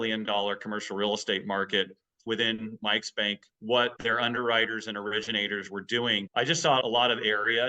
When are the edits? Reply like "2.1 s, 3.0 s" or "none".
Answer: 2.2 s, 4.0 s, 6.2 s